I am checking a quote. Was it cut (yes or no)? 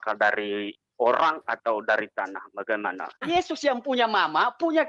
yes